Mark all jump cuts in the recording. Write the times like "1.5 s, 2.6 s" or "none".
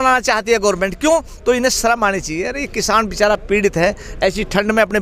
1.3 s